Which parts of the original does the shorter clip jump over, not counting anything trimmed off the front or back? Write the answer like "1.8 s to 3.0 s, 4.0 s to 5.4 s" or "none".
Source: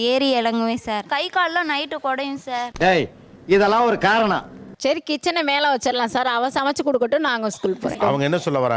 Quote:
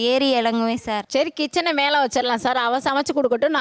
1.0 s to 4.7 s